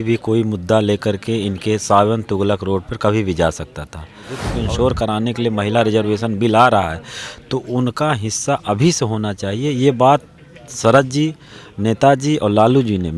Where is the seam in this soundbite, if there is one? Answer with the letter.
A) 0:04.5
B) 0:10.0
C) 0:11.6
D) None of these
A